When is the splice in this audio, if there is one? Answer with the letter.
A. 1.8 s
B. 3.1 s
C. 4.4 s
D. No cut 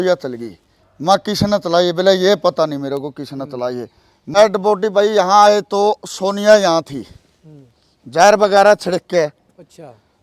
C